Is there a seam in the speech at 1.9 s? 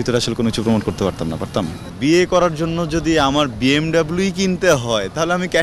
yes; 1 cut; at 1.9 s

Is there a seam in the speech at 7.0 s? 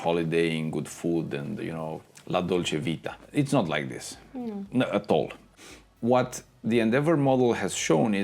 no; 3 cuts; at 1.6 s, 3.1 s, 5.5 s

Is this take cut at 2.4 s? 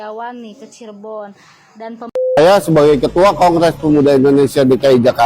yes; 1 cut; at 2.4 s

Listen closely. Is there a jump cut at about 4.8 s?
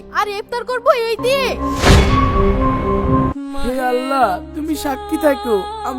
no; 2 cuts; at 1.5 s, 3.3 s

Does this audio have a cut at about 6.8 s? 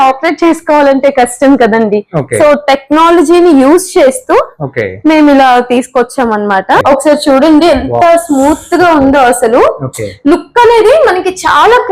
yes; 1 cut; at 6.8 s

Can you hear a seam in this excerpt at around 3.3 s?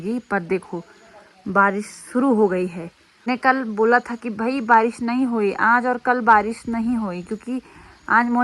yes; 1 cut; at 3.3 s

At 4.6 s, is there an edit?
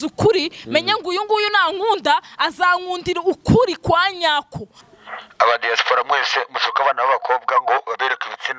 yes; 1 cut; at 4.6 s

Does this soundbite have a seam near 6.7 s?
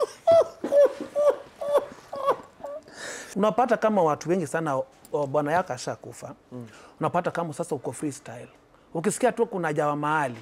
no; 1 cut; at 3.2 s

